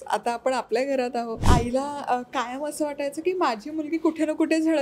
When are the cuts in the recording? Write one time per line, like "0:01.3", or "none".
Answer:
0:01.5